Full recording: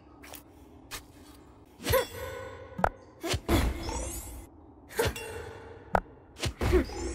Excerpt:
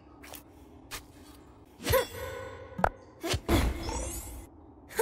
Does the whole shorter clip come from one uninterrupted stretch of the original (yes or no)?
yes